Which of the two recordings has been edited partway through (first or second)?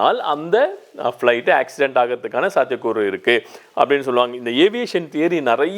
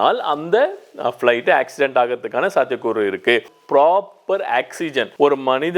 second